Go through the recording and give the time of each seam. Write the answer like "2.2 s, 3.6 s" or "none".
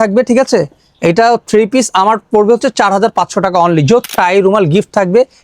4.1 s